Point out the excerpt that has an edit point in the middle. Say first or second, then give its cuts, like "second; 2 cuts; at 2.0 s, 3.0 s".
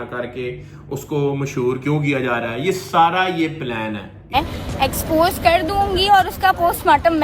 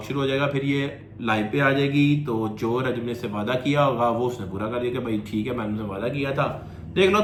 first; 1 cut; at 4.3 s